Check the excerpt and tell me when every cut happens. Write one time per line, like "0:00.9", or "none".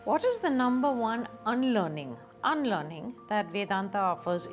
none